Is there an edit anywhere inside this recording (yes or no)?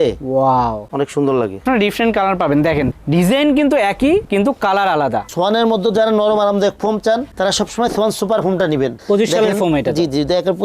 yes